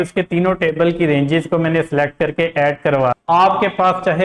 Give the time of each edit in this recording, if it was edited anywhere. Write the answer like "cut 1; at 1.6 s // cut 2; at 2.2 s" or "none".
cut 1; at 3.2 s